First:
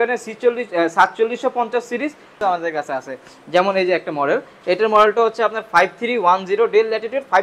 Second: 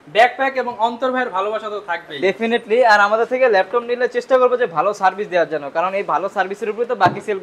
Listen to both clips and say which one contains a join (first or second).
first